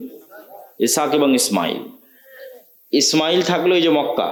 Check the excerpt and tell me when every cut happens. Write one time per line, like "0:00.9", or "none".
none